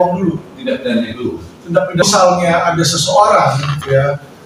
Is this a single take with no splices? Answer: no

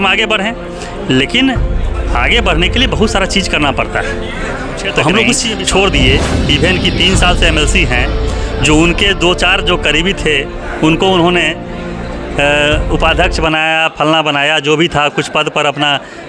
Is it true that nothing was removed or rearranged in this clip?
no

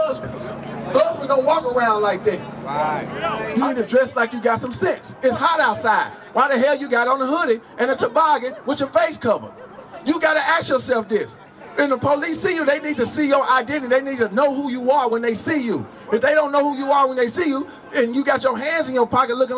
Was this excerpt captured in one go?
no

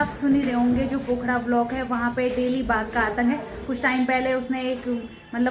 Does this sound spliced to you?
no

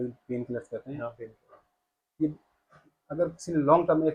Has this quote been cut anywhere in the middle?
no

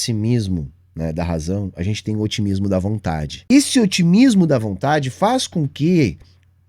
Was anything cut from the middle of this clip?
yes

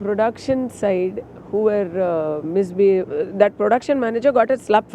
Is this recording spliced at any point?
yes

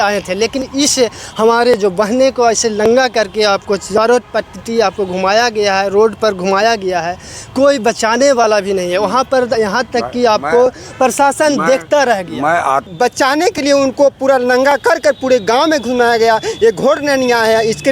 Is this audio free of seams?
no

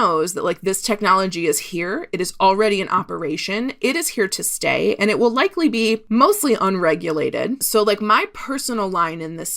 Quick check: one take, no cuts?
no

